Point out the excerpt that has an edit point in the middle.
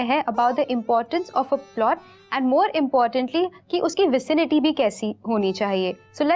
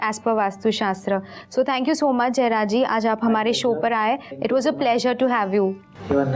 second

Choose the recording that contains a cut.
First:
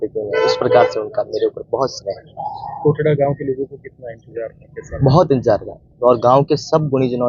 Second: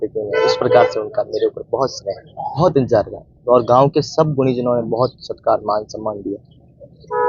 second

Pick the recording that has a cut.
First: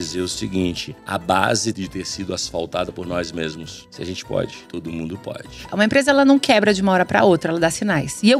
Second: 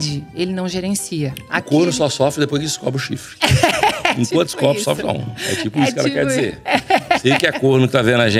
first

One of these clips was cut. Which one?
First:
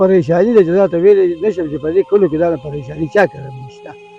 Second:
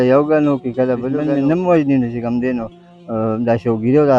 second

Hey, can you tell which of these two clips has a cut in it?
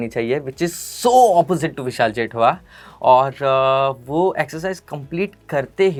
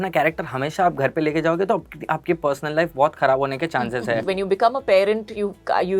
second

